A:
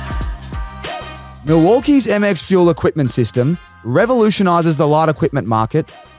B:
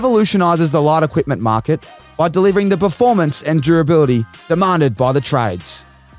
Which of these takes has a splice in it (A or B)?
A